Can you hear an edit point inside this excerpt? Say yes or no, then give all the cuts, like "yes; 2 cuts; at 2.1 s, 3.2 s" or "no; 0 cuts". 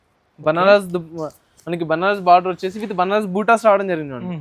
no; 0 cuts